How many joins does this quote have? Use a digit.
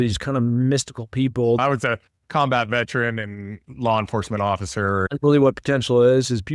2